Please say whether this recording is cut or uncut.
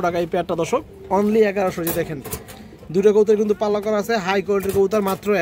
uncut